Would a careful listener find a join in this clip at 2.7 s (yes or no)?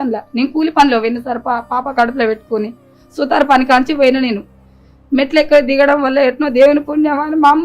no